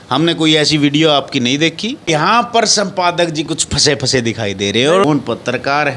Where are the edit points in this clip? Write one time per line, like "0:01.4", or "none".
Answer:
0:02.1
0:05.0